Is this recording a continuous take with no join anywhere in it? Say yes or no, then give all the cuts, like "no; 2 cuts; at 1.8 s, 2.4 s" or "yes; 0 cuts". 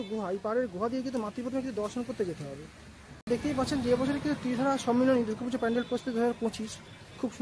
no; 1 cut; at 3.2 s